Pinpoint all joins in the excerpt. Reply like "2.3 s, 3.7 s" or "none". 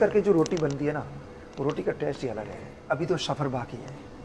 2.8 s